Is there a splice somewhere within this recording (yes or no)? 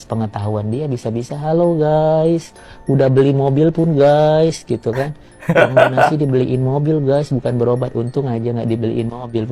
no